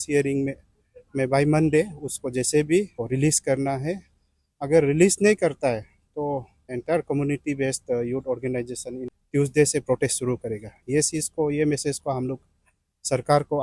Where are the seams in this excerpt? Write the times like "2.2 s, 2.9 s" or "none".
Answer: 3.0 s, 6.8 s, 9.1 s